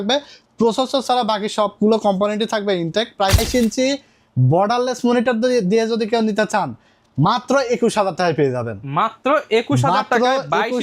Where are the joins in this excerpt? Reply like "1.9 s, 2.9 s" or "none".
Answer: 3.4 s